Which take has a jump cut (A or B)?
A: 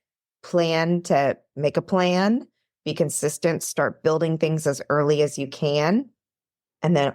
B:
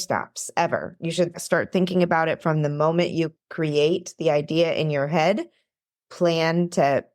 B